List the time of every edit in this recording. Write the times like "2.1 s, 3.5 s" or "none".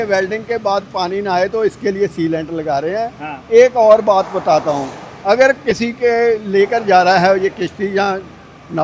none

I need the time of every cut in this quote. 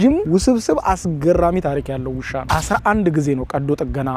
2.5 s

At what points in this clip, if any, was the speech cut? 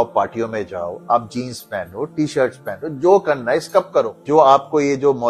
4.2 s

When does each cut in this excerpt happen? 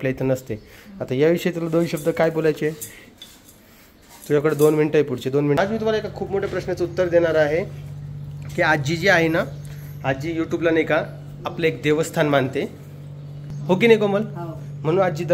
5.6 s

